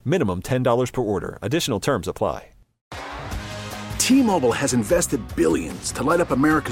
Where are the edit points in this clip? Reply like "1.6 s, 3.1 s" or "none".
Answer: 2.9 s